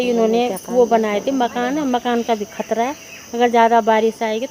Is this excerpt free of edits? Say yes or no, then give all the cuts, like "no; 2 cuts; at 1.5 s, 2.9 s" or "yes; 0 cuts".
yes; 0 cuts